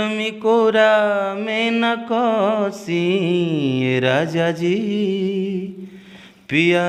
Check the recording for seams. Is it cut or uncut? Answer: uncut